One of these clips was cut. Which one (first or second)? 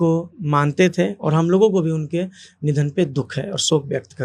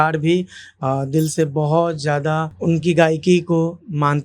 second